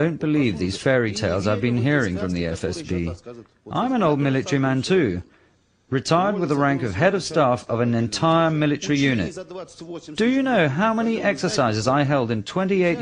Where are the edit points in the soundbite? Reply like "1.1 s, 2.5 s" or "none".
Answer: 4.5 s